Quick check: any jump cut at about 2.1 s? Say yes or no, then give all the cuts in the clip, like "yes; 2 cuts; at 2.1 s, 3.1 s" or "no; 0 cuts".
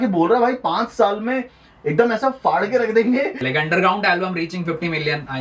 no; 1 cut; at 3.4 s